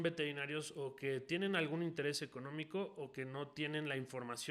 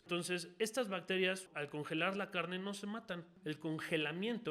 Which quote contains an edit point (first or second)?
second